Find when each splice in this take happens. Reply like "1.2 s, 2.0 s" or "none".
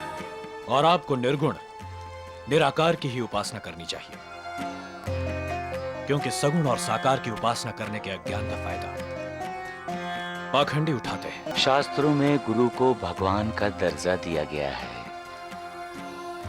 11.4 s